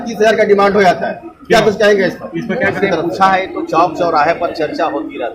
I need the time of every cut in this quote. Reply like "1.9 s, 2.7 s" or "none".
2.8 s